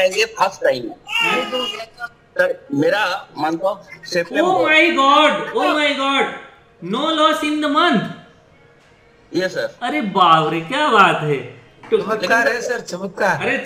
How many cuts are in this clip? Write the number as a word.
zero